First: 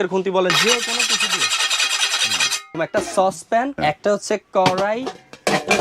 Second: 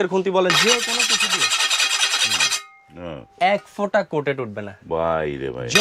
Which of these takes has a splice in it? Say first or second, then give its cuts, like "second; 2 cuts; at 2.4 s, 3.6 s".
first; 2 cuts; at 2.7 s, 3.7 s